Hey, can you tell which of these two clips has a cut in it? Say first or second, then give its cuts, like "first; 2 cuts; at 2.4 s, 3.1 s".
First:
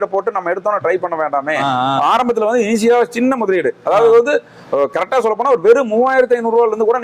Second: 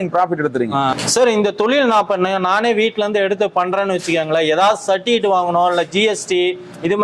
second; 1 cut; at 0.9 s